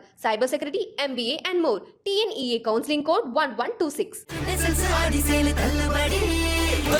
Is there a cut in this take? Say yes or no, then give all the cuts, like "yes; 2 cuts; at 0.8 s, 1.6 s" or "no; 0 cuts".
no; 0 cuts